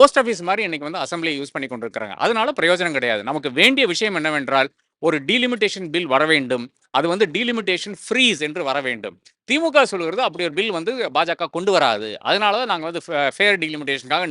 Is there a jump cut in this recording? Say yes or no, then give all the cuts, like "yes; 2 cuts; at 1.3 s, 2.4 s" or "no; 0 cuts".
no; 0 cuts